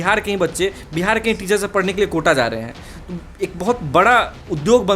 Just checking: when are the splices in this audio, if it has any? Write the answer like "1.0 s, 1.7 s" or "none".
none